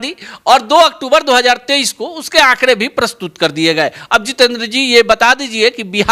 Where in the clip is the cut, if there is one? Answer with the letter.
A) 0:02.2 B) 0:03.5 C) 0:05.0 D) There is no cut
D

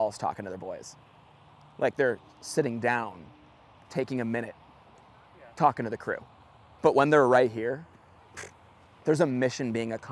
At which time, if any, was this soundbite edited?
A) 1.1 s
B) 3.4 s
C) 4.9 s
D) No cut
D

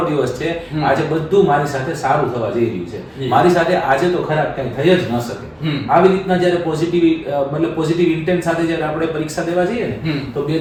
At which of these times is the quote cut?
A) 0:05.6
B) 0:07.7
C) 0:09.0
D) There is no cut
D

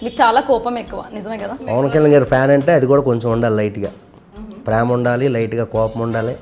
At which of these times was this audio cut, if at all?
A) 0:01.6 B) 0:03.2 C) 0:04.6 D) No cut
A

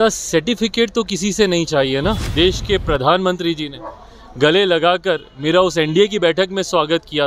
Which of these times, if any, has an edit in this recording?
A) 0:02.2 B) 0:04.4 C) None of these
A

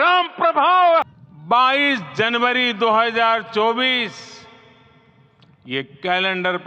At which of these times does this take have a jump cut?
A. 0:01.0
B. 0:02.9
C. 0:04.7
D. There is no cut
A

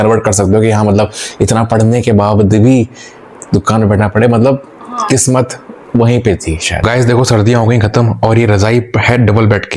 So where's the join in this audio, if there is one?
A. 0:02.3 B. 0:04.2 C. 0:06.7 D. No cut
C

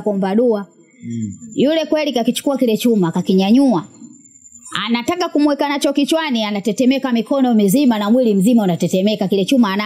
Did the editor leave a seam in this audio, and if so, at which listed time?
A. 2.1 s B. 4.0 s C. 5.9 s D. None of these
D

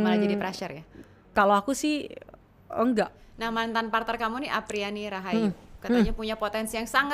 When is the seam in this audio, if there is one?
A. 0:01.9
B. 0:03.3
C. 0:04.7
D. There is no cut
B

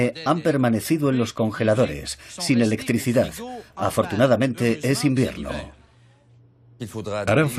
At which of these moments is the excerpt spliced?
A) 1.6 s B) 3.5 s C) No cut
A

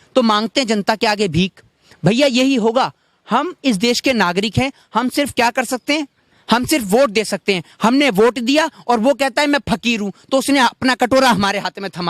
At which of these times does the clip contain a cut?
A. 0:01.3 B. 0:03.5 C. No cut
C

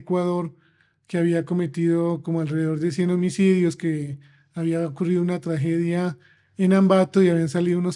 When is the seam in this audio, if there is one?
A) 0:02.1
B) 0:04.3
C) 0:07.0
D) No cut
D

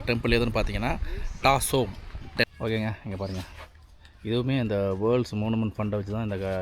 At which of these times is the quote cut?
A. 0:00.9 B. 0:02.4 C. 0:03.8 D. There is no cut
B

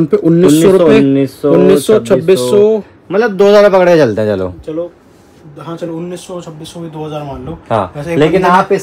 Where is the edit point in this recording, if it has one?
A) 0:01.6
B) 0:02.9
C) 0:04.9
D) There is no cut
D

